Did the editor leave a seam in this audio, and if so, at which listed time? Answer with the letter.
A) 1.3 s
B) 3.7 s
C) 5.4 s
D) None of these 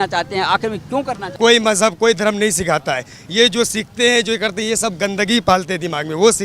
A